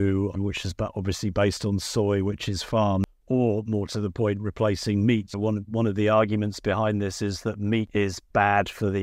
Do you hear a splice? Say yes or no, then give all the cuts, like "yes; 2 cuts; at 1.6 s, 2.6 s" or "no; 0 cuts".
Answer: yes; 2 cuts; at 3.1 s, 7.9 s